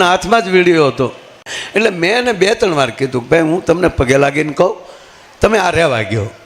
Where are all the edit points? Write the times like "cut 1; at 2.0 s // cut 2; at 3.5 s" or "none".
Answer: cut 1; at 1.5 s

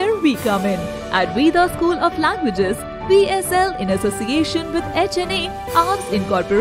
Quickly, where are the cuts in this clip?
none

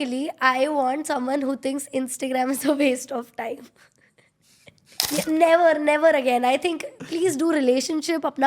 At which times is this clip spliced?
cut 1; at 5.0 s

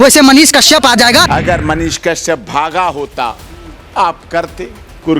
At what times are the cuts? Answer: cut 1; at 1.3 s

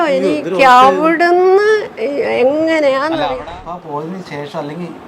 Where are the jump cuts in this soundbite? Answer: cut 1; at 3.4 s

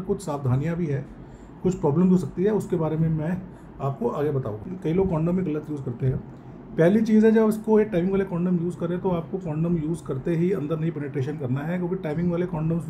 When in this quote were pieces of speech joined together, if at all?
cut 1; at 4.6 s

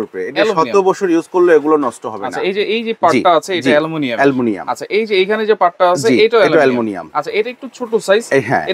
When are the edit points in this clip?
none

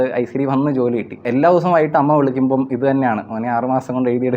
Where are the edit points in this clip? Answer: cut 1; at 1.2 s

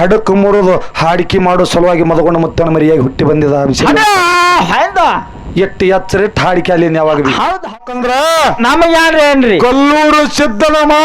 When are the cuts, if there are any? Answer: cut 1; at 7.7 s

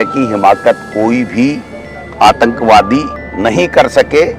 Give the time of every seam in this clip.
cut 1; at 3.2 s

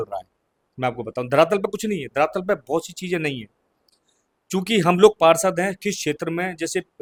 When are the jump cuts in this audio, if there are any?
none

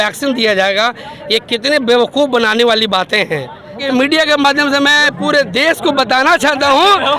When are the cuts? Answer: cut 1; at 3.8 s

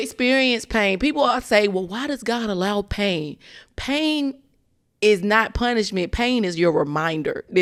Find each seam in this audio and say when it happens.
none

